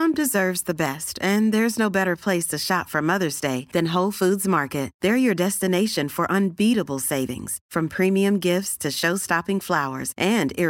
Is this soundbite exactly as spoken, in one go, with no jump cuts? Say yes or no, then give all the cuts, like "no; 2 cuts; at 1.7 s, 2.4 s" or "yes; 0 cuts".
yes; 0 cuts